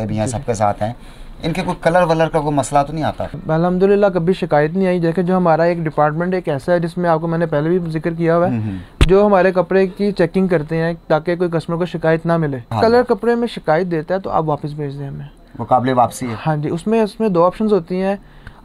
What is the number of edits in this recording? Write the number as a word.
two